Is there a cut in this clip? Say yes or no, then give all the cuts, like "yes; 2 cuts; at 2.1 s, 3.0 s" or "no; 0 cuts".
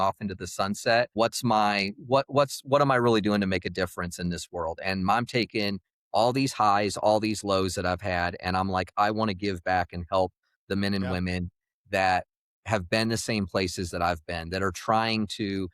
yes; 1 cut; at 1.1 s